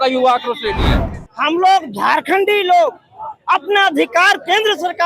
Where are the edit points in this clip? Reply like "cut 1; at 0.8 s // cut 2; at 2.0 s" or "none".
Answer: cut 1; at 1.0 s

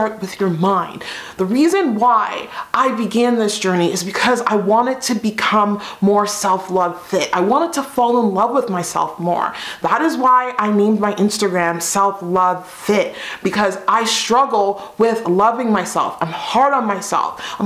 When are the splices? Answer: none

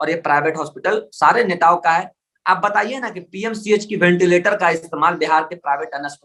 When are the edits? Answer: none

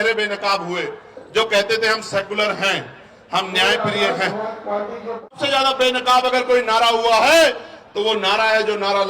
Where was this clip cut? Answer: cut 1; at 5.4 s

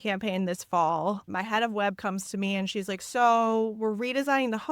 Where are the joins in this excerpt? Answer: cut 1; at 1.3 s

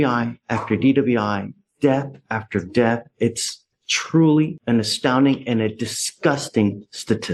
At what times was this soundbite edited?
none

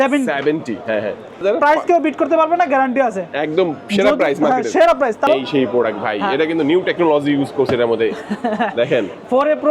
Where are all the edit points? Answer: cut 1; at 1.4 s // cut 2; at 5.3 s

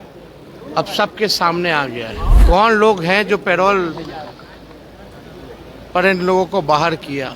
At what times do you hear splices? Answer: cut 1; at 2.3 s

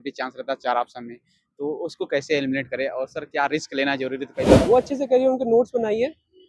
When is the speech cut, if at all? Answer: cut 1; at 4.5 s

